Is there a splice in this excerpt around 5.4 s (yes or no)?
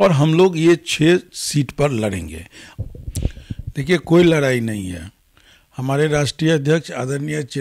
no